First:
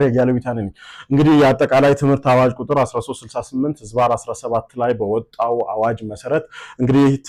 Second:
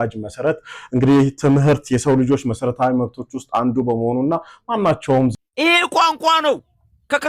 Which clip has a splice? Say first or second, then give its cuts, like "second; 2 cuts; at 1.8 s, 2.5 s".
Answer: second; 1 cut; at 5.3 s